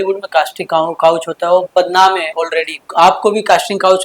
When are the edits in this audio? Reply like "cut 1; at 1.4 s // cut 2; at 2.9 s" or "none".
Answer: cut 1; at 2.8 s